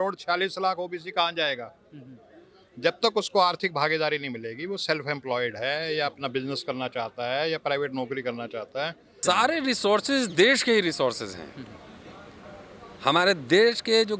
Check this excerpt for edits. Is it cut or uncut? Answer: cut